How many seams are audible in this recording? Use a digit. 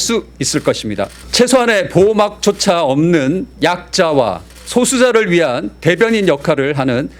3